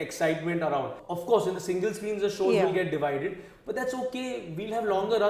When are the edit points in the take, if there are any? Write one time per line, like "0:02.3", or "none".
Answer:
0:01.0